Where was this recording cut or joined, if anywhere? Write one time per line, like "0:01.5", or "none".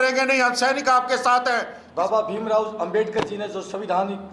0:01.8